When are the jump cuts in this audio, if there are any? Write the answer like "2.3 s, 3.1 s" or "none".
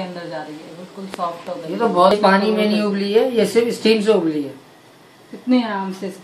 2.1 s